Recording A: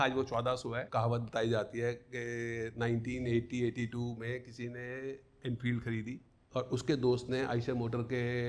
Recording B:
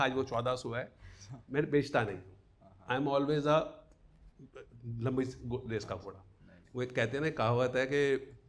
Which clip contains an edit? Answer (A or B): A